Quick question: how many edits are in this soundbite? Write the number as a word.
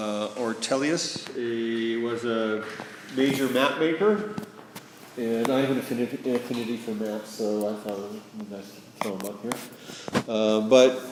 zero